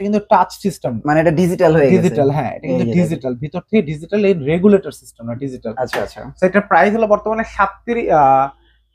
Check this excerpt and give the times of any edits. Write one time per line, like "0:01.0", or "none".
none